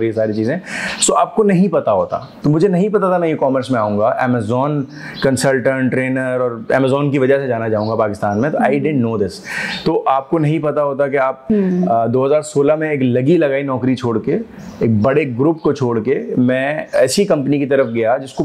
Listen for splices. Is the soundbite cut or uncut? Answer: cut